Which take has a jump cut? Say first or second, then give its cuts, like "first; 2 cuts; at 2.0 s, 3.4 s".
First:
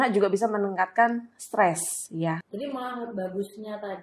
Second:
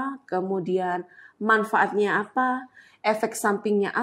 first; 1 cut; at 2.5 s